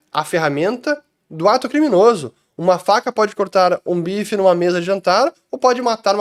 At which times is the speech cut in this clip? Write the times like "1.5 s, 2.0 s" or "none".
none